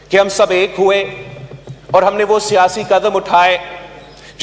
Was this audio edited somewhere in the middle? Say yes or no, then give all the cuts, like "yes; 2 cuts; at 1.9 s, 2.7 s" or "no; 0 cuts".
no; 0 cuts